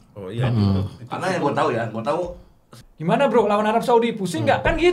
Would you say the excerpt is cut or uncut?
cut